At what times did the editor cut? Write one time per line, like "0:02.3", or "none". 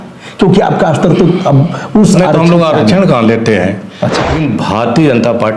0:04.3